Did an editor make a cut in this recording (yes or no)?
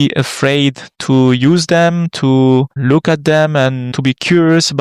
yes